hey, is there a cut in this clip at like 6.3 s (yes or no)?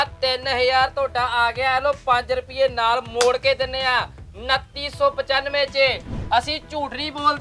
yes